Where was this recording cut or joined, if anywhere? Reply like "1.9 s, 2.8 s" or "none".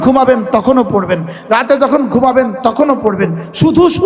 none